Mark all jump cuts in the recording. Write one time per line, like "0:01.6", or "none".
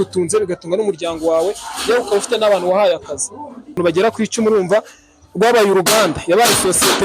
0:03.8